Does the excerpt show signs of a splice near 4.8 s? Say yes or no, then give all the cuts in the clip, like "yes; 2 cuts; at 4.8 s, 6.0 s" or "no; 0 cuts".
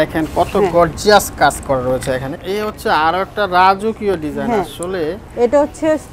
no; 1 cut; at 2.4 s